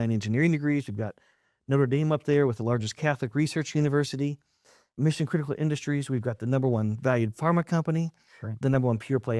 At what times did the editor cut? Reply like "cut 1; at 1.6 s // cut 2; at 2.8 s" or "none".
cut 1; at 4.9 s